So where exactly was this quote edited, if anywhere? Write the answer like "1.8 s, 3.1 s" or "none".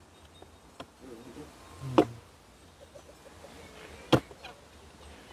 none

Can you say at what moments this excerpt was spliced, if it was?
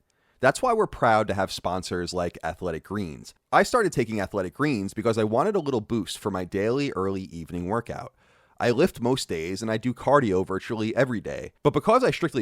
3.3 s

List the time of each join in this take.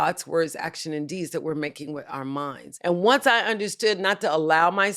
2.6 s

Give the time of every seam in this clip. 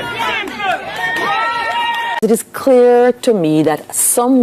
2.2 s

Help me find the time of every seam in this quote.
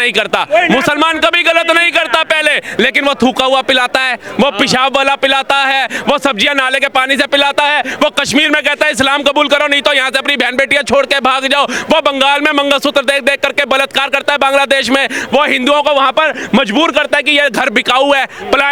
none

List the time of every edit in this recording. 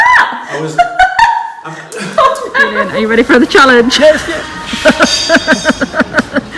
2.8 s

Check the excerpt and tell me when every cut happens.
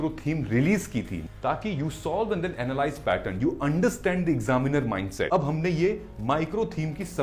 1.2 s, 5.3 s

